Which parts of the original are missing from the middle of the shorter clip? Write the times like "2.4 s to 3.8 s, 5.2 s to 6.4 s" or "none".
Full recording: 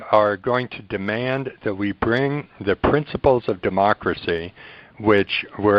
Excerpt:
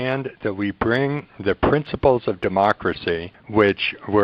4.5 s to 4.8 s